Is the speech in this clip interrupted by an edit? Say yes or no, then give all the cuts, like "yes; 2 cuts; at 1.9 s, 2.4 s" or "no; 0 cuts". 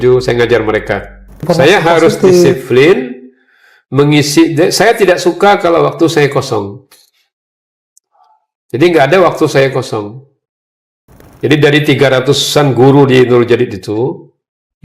yes; 2 cuts; at 1.4 s, 11.2 s